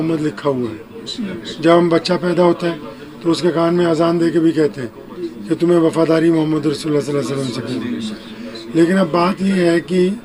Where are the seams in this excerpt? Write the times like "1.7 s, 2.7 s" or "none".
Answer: none